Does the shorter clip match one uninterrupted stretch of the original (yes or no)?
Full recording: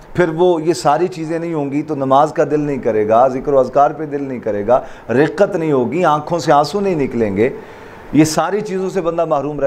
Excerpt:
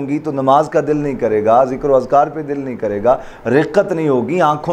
yes